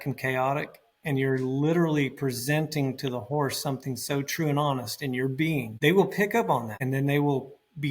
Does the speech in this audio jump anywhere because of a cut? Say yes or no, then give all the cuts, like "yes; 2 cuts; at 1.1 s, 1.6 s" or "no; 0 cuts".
yes; 2 cuts; at 5.7 s, 6.7 s